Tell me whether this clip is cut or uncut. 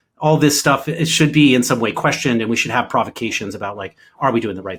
uncut